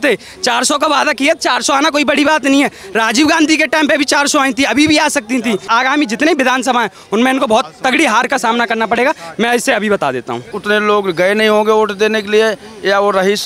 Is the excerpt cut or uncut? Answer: cut